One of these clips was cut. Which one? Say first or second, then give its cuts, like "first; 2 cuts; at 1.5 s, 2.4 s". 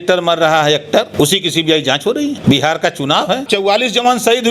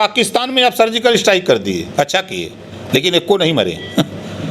first; 3 cuts; at 1.1 s, 2.4 s, 3.4 s